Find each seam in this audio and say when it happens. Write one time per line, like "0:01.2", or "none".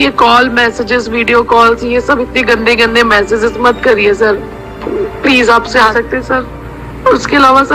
0:05.9